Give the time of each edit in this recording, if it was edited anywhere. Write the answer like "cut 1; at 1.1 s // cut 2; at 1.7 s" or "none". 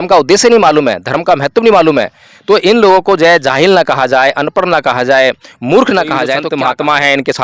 cut 1; at 6.5 s

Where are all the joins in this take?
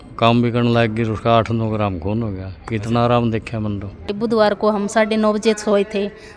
cut 1; at 4.1 s

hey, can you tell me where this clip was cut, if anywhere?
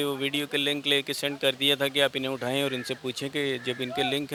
none

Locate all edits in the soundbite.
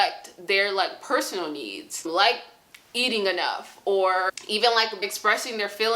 cut 1; at 2.1 s // cut 2; at 4.3 s // cut 3; at 5.0 s

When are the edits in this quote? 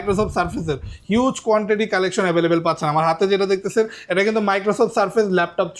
none

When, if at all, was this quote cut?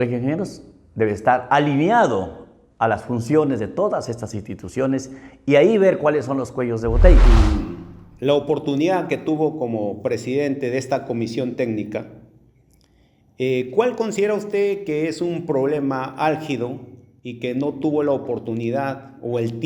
cut 1; at 7.2 s

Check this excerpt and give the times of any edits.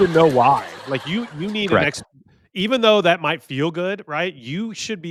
none

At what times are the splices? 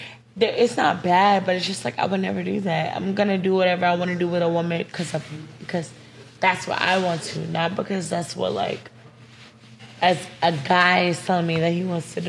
none

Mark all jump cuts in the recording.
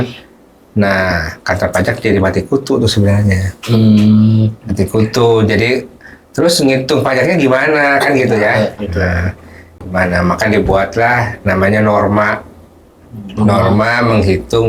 none

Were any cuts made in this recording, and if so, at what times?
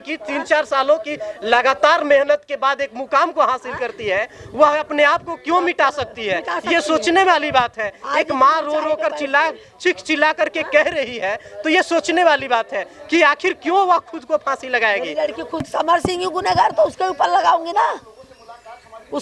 cut 1; at 15.7 s

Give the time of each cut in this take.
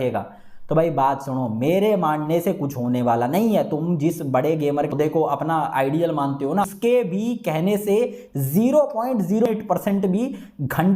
cut 1; at 4.9 s // cut 2; at 6.7 s // cut 3; at 9.5 s

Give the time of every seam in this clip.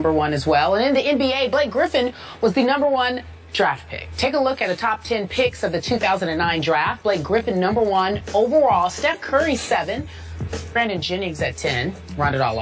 cut 1; at 8.2 s

